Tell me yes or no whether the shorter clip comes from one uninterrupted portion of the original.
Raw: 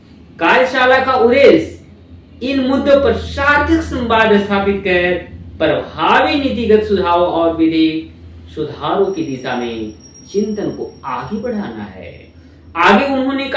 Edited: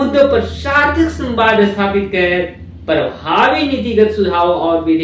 yes